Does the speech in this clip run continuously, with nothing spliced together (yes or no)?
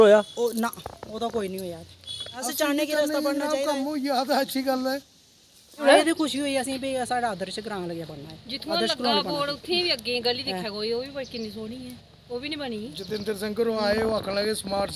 no